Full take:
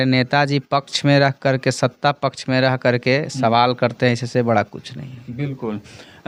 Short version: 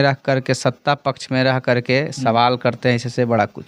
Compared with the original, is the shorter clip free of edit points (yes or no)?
yes